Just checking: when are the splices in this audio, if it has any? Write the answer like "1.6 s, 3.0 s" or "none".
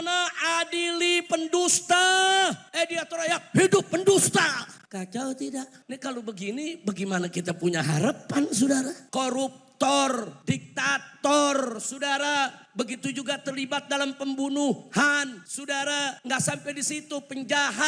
2.6 s, 4.7 s, 5.8 s, 9.0 s, 10.3 s, 12.6 s, 16.0 s